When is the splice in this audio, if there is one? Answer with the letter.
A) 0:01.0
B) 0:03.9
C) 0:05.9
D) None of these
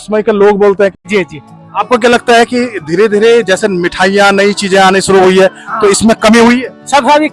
A